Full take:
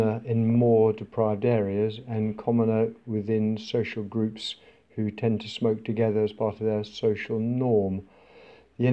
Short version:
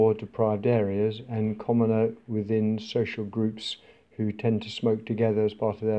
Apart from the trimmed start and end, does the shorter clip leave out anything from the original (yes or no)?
no